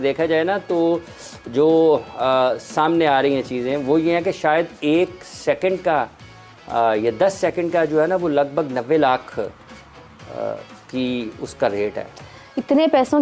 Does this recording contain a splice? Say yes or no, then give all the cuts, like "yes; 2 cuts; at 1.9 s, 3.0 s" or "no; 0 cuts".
no; 0 cuts